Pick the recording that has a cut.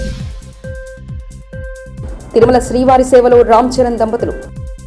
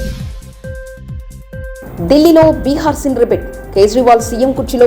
second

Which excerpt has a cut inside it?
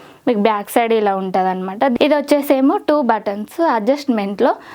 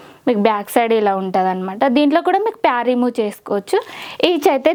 first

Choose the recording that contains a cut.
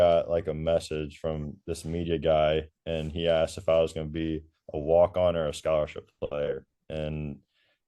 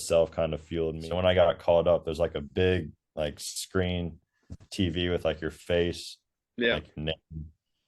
second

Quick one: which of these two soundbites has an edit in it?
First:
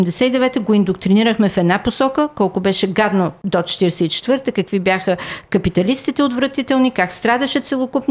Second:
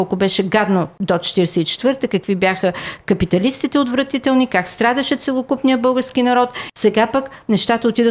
second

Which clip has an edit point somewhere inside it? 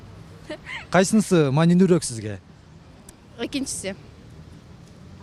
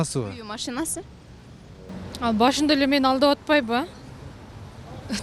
second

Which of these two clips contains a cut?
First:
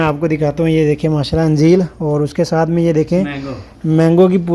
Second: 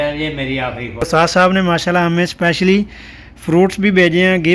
second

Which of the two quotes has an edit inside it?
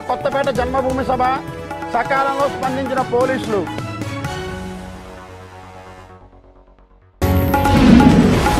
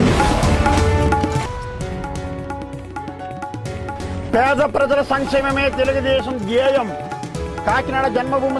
second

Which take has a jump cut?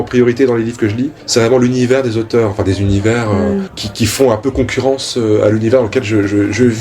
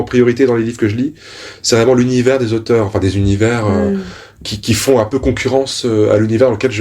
first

